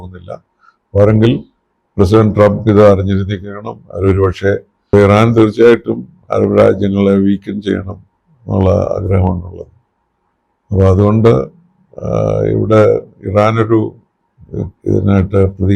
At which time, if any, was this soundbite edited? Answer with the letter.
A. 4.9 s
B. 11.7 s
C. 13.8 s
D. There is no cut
A